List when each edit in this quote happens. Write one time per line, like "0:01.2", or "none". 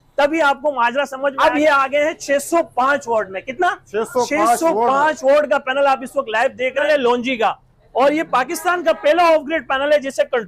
0:01.3
0:06.8